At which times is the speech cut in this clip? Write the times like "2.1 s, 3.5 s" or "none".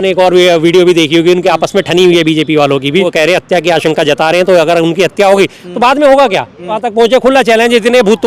3.1 s, 6.8 s